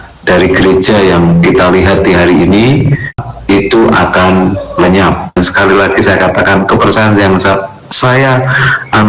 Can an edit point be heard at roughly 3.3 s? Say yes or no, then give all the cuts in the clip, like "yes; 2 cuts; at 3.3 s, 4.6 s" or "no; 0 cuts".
yes; 2 cuts; at 3.3 s, 5.3 s